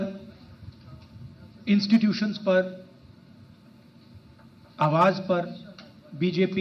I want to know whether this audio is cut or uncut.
uncut